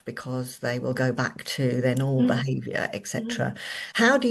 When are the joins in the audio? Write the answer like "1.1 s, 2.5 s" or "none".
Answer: none